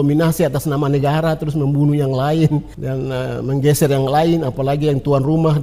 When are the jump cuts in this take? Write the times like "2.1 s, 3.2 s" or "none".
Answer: 2.8 s